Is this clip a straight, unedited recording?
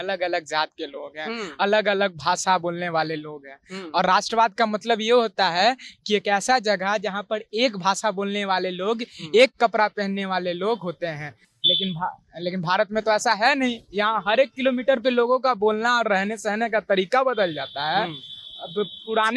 yes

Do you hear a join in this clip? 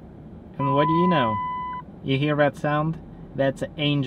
no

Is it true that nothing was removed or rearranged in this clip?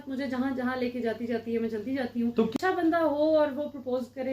no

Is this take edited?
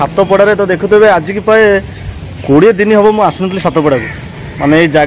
no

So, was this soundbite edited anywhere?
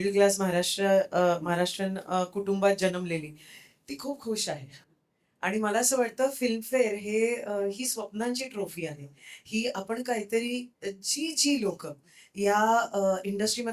no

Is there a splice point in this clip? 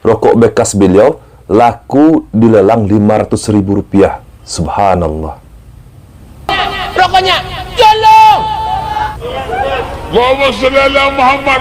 no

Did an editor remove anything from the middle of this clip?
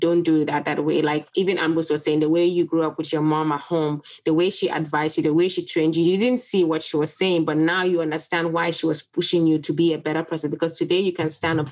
no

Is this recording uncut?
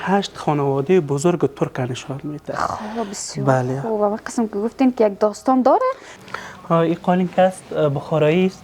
no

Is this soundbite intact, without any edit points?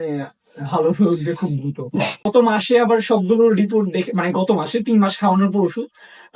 no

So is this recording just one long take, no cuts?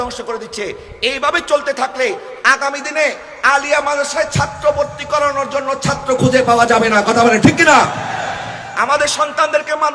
yes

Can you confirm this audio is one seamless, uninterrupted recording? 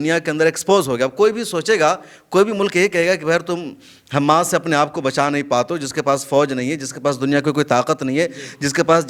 yes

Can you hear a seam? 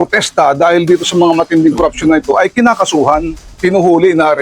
no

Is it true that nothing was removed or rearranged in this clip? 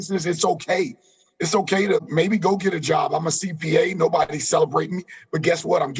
no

